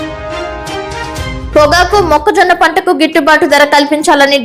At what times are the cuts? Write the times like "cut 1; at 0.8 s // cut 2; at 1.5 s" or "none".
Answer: cut 1; at 1.4 s